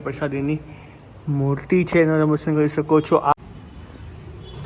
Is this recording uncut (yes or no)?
no